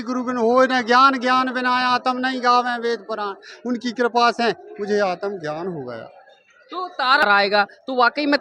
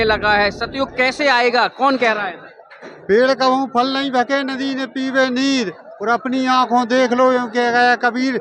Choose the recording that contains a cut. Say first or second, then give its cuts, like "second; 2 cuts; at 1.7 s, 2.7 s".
first; 1 cut; at 7.2 s